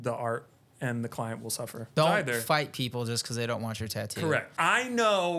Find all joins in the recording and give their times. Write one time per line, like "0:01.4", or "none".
0:01.9
0:04.5